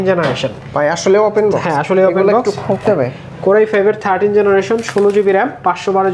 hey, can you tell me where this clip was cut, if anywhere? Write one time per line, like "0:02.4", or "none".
none